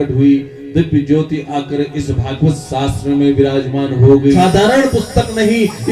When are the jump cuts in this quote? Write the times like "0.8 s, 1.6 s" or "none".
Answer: 4.4 s